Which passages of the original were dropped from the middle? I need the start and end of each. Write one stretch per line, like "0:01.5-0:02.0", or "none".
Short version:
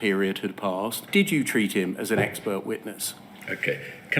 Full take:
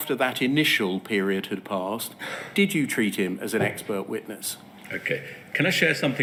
0:02.1-0:02.4